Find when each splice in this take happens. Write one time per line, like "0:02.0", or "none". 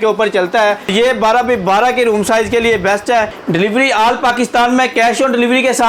0:00.9
0:03.4